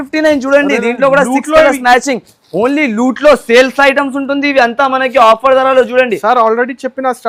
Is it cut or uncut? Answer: uncut